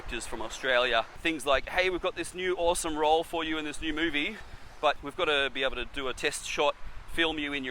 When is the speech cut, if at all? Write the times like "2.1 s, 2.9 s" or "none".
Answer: 1.2 s, 5.0 s